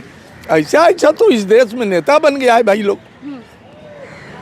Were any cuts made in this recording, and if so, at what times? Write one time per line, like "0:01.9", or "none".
none